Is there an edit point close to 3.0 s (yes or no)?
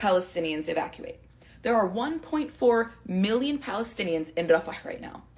no